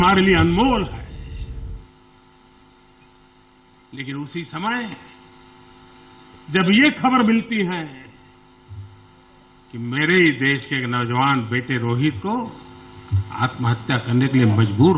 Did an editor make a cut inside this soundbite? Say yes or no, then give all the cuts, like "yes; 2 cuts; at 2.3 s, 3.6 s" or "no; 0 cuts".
no; 0 cuts